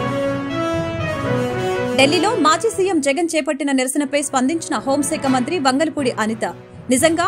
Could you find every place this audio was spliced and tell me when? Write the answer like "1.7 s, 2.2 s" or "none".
1.9 s